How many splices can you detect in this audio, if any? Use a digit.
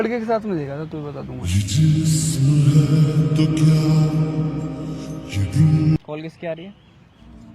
1